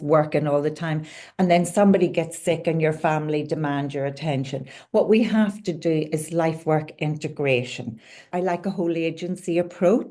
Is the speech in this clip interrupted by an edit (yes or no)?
yes